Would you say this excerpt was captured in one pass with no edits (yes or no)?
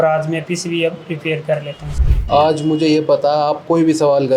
no